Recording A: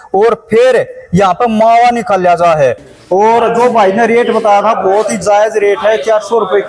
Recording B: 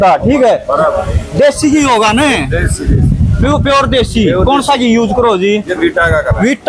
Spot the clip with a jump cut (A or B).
A